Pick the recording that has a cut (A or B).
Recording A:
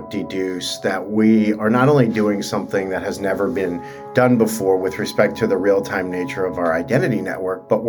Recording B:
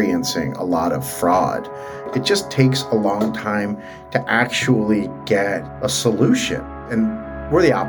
B